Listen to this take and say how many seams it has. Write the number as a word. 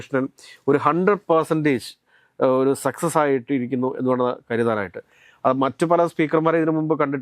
zero